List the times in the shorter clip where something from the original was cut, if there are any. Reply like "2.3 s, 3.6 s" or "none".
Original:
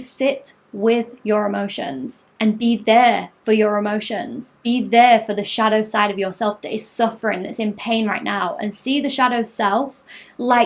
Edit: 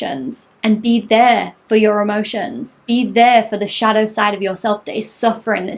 none

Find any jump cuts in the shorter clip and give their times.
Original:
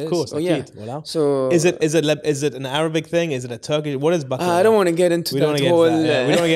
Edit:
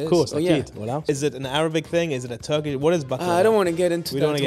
1.0 s

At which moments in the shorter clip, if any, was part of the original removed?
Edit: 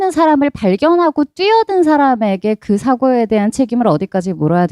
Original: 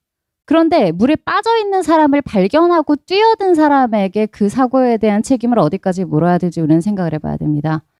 none

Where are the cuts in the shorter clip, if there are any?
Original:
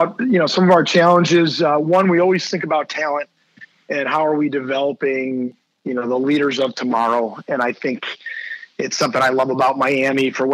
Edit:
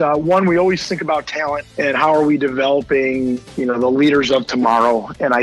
1.7 s, 3.5 s

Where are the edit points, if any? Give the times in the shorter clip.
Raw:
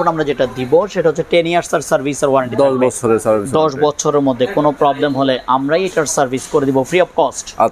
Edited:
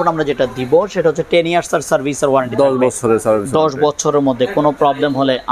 none

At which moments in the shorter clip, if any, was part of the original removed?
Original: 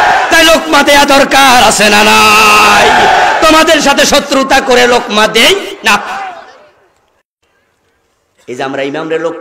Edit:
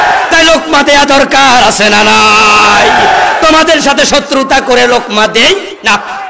none

